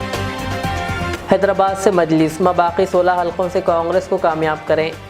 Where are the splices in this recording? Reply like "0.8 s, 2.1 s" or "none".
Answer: 1.1 s

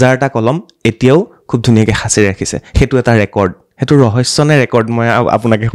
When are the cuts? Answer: none

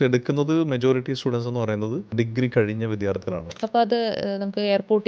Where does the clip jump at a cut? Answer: 3.5 s

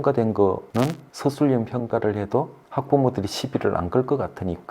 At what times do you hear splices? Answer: 1.1 s, 2.6 s

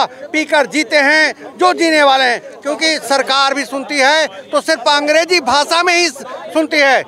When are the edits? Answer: 2.5 s

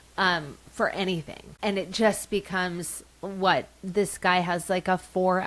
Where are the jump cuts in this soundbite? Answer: 1.4 s

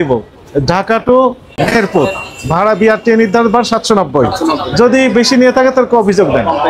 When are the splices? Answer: 1.4 s

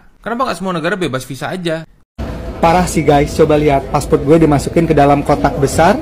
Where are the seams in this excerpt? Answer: 2.0 s

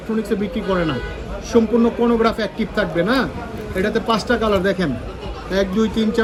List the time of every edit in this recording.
none

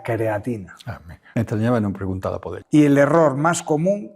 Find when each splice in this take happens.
1.2 s, 2.5 s

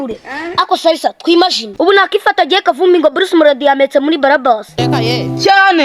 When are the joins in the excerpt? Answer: 1.7 s

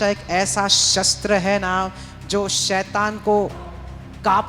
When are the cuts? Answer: none

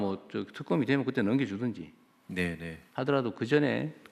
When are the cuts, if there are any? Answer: none

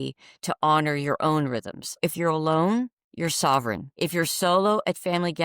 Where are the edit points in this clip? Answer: 2.0 s, 3.9 s

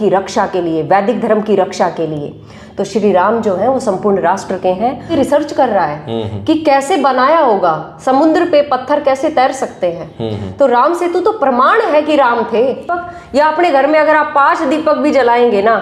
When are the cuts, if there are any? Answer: 5.1 s, 12.9 s

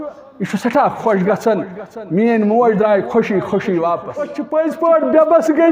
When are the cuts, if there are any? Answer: 4.4 s

